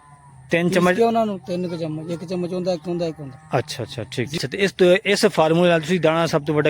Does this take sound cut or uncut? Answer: cut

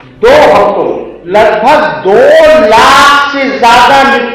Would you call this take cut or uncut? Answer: cut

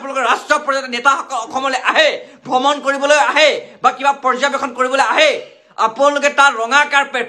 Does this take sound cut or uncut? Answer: uncut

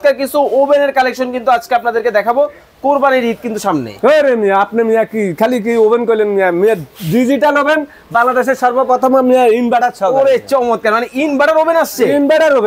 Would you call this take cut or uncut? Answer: uncut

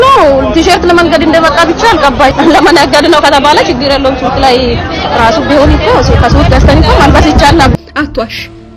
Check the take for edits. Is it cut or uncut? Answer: cut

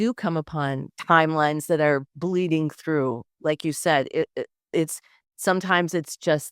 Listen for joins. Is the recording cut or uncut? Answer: cut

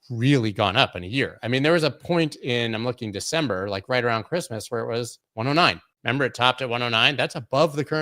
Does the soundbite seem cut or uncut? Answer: cut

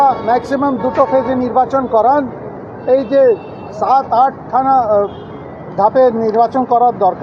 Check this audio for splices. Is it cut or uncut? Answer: uncut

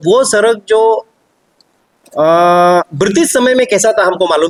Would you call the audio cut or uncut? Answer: uncut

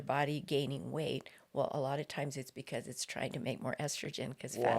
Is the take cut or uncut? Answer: uncut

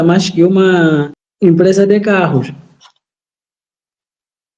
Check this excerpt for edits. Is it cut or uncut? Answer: cut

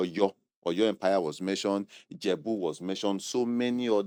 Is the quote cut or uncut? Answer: uncut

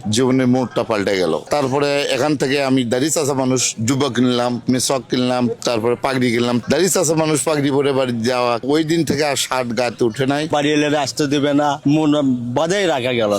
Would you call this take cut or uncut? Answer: cut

